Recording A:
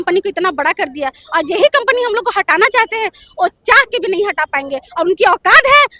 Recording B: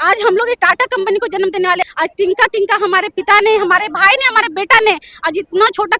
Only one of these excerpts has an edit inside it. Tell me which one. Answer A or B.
B